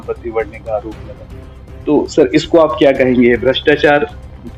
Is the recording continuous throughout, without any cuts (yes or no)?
yes